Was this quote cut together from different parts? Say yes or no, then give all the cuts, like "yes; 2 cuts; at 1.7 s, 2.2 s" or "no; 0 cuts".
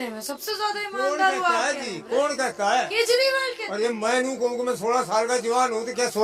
no; 0 cuts